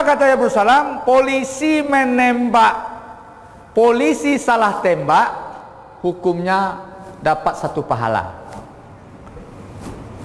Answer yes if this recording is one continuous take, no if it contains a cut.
yes